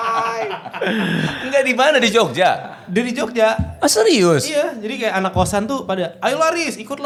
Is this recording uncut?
yes; 0 cuts

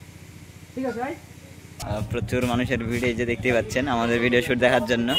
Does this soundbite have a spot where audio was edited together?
yes; 1 cut; at 1.8 s

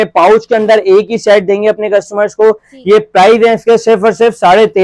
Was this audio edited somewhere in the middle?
no; 0 cuts

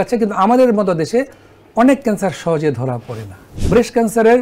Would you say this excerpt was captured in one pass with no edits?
no; 1 cut; at 3.5 s

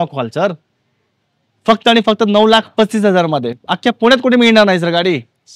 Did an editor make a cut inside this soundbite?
no; 0 cuts

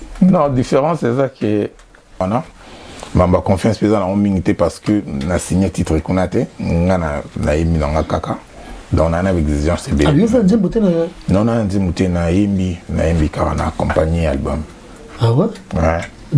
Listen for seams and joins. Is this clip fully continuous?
no; 1 cut; at 2.2 s

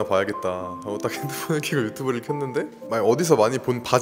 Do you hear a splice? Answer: no; 0 cuts

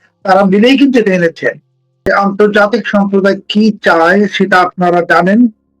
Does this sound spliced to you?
yes; 1 cut; at 2.1 s

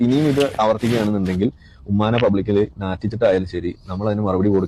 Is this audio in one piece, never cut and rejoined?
yes; 0 cuts

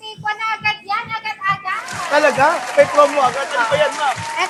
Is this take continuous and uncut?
yes; 0 cuts

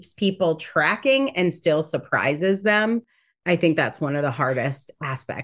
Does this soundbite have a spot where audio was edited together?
no; 0 cuts

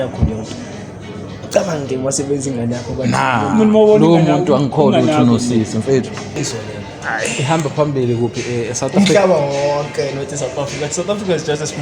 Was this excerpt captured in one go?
no; 1 cut; at 6.4 s

